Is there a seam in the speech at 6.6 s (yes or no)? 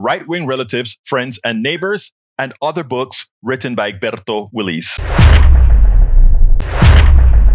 yes